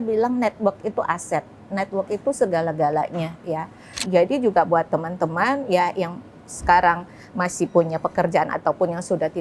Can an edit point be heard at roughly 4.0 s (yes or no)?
yes